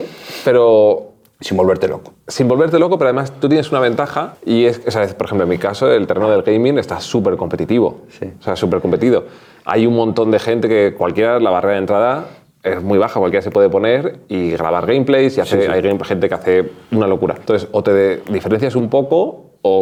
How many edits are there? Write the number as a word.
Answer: zero